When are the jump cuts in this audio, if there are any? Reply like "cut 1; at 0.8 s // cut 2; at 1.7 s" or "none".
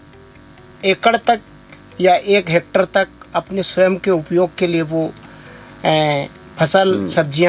none